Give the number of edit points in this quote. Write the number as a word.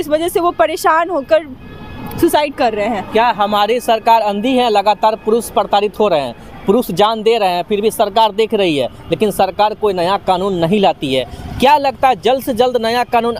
zero